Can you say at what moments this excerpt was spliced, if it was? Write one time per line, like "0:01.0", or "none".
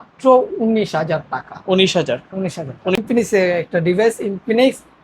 0:03.0